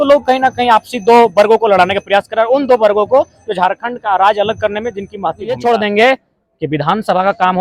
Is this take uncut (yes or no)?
no